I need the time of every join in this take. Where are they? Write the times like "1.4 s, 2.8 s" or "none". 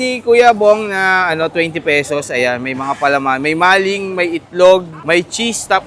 4.9 s